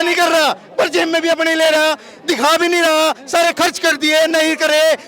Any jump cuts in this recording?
no; 0 cuts

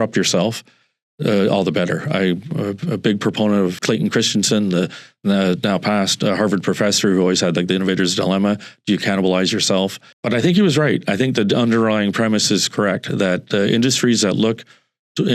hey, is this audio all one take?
yes; 0 cuts

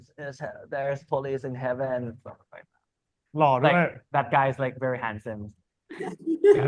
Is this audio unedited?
yes; 0 cuts

